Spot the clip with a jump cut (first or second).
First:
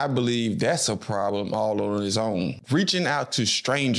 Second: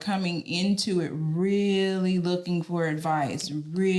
first